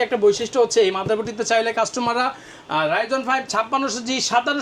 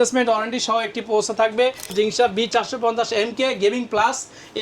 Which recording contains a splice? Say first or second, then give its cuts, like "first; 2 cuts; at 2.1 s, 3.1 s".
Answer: second; 1 cut; at 1.9 s